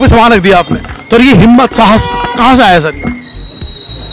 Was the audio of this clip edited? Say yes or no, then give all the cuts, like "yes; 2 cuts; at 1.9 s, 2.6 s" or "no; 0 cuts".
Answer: no; 0 cuts